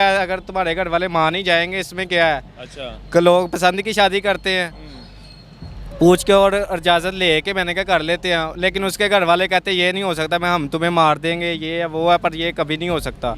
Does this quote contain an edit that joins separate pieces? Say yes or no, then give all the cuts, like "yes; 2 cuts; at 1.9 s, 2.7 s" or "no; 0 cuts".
no; 0 cuts